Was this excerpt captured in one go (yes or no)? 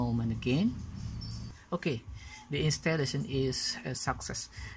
no